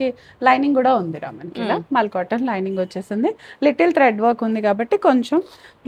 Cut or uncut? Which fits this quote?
uncut